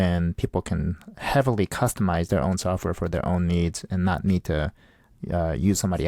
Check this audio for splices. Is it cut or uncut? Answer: uncut